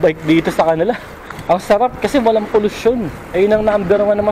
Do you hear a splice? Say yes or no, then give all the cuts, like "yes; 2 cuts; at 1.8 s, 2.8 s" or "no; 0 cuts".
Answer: no; 0 cuts